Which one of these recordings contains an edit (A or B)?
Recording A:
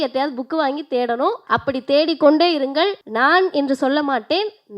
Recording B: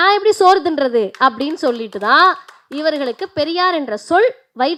A